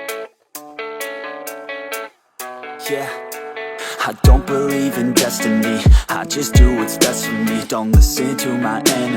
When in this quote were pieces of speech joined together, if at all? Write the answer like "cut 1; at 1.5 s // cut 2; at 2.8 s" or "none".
cut 1; at 2.2 s